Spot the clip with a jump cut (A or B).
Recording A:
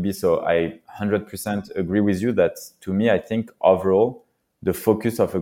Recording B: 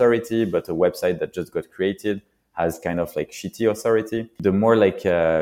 B